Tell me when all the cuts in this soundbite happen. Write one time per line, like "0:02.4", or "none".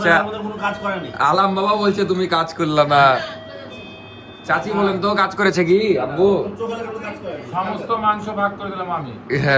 none